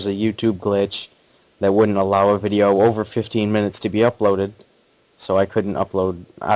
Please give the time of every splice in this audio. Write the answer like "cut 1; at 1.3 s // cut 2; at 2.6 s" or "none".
cut 1; at 5.6 s